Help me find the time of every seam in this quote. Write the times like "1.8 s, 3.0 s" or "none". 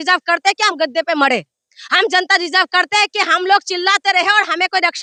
none

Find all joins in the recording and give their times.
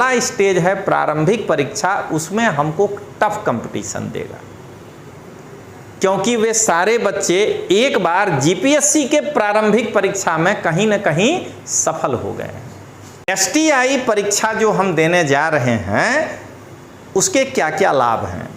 13.3 s

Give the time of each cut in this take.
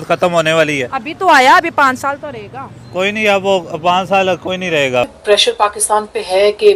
5.1 s

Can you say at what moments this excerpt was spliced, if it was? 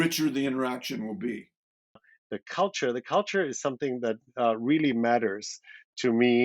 2.1 s

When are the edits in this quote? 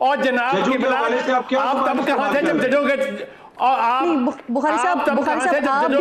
none

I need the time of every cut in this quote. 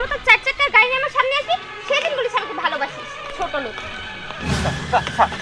4.5 s

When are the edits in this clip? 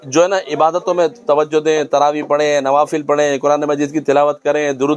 none

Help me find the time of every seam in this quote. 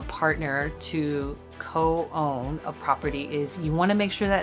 none

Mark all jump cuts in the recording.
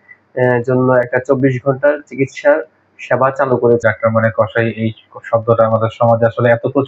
3.8 s

